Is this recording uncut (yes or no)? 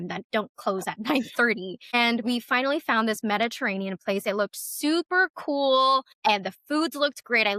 yes